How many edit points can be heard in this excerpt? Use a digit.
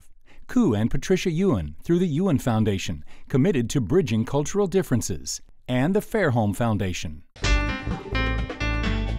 1